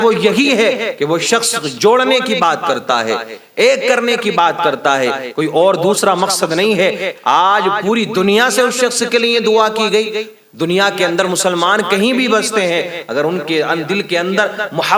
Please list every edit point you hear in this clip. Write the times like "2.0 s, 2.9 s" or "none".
none